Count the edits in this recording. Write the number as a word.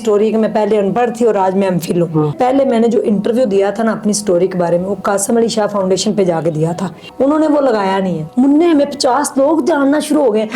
three